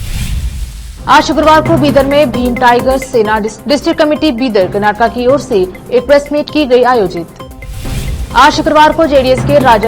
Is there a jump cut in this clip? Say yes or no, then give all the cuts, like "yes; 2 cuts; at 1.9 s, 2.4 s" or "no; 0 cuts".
yes; 1 cut; at 0.9 s